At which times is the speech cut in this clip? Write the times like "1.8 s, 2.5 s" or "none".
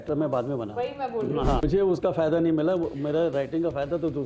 1.6 s